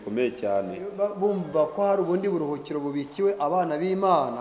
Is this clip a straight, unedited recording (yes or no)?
no